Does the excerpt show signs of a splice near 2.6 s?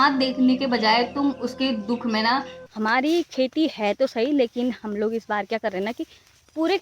yes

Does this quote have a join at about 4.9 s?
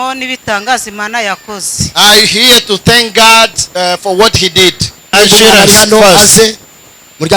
yes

